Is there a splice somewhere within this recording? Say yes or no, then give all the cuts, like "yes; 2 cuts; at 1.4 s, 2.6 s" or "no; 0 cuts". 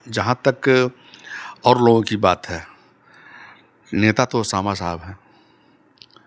no; 0 cuts